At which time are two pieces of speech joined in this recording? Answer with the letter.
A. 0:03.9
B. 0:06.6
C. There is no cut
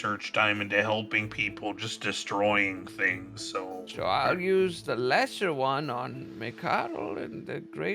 A